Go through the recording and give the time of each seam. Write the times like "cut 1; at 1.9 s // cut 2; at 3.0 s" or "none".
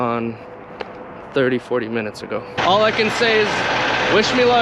cut 1; at 2.6 s